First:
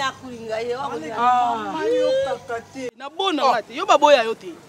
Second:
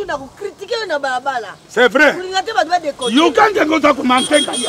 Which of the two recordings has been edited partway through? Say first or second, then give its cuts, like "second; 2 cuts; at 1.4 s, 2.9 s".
first; 1 cut; at 3.1 s